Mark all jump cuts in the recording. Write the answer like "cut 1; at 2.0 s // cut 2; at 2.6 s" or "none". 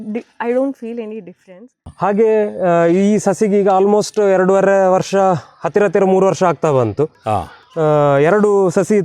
cut 1; at 1.9 s